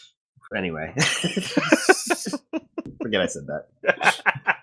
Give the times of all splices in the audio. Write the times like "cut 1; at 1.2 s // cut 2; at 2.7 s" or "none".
cut 1; at 1.5 s